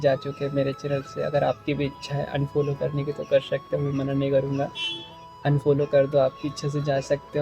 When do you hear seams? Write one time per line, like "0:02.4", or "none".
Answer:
none